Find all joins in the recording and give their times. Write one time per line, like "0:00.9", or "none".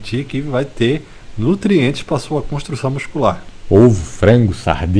none

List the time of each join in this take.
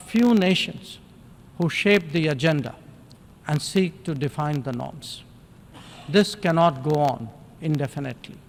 none

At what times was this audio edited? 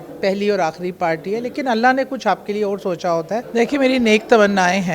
0:03.5

